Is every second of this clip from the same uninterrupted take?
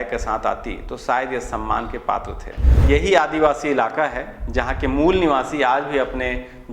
no; 1 cut; at 2.8 s

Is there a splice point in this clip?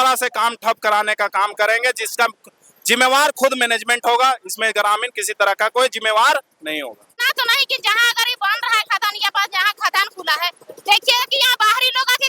yes; 1 cut; at 7.2 s

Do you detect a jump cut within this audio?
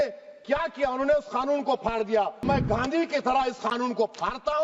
yes; 1 cut; at 2.5 s

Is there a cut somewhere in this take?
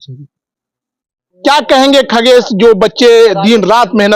yes; 1 cut; at 1.3 s

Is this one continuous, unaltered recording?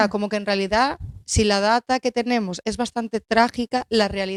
yes; 0 cuts

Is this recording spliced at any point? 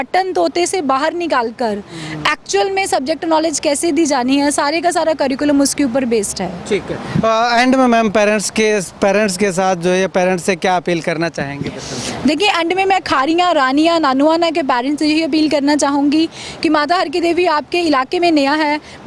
no; 0 cuts

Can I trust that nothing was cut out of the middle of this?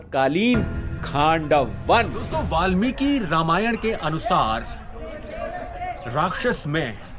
yes; 0 cuts

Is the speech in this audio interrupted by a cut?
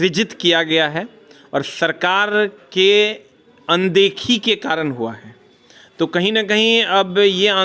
no; 0 cuts

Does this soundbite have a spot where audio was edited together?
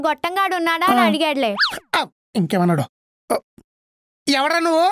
no; 0 cuts

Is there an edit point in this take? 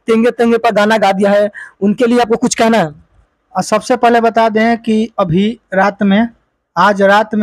no; 0 cuts

